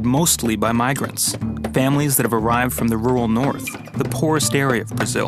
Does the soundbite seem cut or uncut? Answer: uncut